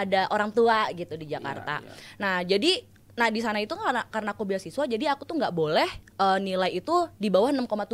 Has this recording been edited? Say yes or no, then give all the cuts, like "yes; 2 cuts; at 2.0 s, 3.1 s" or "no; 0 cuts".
no; 0 cuts